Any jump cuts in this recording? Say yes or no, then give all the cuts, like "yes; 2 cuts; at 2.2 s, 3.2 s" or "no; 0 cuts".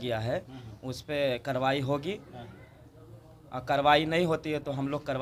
no; 0 cuts